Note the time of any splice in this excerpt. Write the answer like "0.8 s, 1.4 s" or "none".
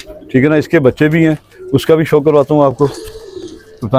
none